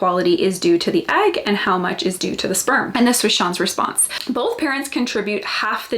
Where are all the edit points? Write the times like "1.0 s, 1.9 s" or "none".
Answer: 2.9 s, 4.1 s